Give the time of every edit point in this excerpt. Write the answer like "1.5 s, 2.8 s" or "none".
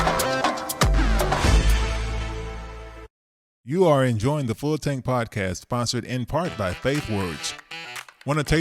3.1 s